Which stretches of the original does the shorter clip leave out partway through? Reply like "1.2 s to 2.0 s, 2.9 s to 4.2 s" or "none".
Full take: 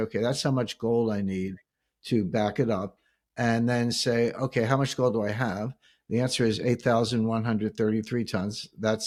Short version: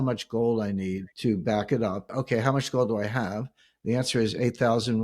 1.6 s to 1.9 s, 3.0 s to 4.4 s